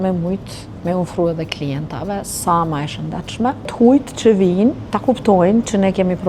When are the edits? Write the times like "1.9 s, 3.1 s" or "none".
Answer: 3.7 s, 4.9 s